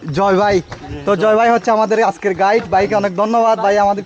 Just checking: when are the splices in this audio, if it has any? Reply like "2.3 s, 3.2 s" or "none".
none

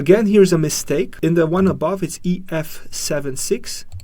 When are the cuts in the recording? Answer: 1.1 s

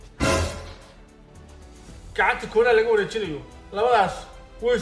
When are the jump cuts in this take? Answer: 0.9 s

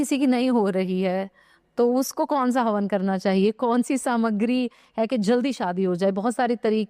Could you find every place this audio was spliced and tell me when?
none

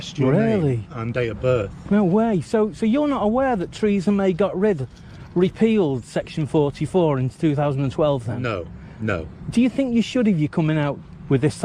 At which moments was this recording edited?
none

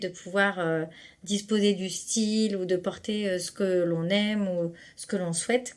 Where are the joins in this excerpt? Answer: none

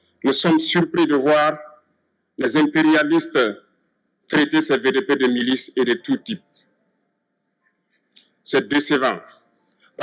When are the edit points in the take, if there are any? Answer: 1.7 s

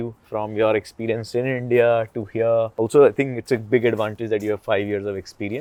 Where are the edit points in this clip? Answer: none

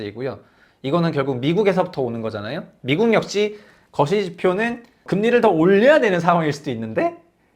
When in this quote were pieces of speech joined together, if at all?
5.0 s

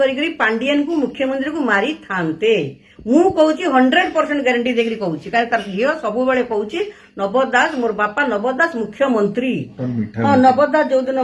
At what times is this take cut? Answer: 9.7 s

